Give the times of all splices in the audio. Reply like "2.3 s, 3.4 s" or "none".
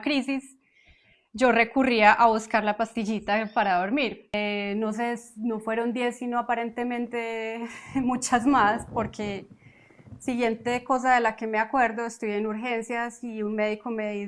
4.3 s